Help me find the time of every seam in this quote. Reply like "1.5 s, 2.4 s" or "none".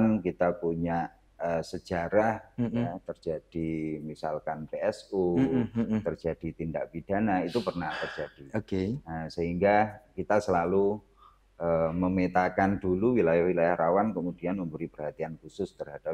none

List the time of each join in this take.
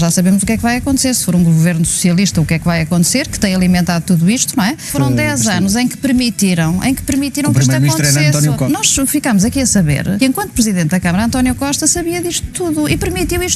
4.9 s, 8.6 s, 10.2 s

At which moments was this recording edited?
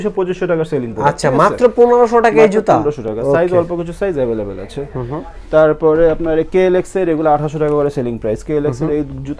none

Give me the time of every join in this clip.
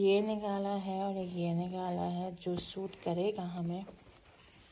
none

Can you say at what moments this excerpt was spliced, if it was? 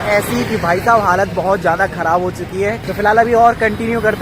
2.8 s

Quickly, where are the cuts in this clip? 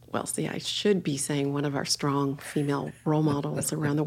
2.9 s

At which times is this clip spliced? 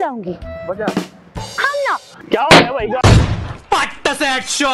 2.3 s

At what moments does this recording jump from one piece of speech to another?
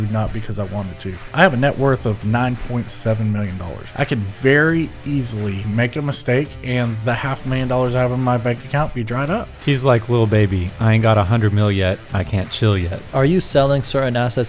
1.3 s, 3.8 s, 5.7 s, 9.5 s, 13.0 s

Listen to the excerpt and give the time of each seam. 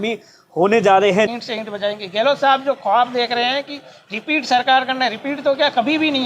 1.3 s

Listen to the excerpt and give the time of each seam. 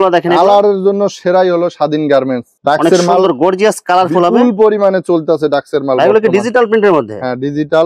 2.5 s

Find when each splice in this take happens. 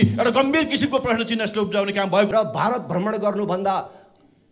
2.3 s

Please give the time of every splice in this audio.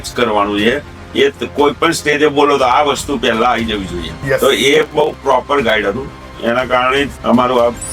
4.1 s, 7.2 s

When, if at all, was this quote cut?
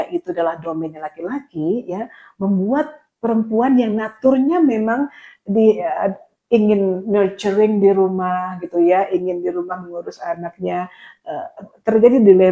none

